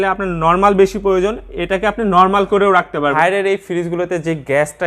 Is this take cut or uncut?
cut